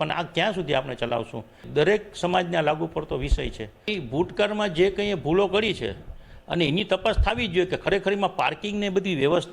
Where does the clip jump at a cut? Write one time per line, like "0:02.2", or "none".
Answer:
0:01.6
0:03.7